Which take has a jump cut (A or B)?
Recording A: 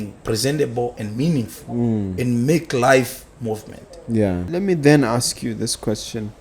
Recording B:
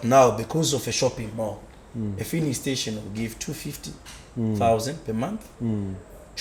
A